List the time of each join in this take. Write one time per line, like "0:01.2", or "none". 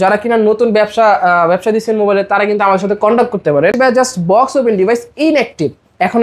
0:03.7